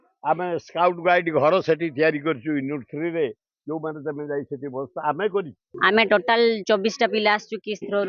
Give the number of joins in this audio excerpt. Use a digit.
1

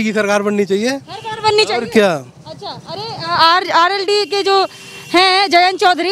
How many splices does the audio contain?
0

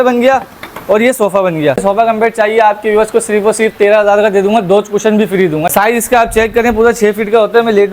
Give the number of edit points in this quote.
2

